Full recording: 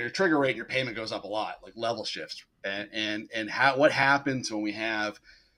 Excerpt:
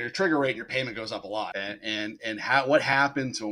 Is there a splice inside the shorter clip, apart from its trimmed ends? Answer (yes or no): yes